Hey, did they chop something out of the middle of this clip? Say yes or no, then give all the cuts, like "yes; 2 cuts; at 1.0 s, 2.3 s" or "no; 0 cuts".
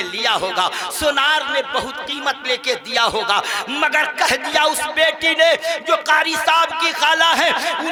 no; 0 cuts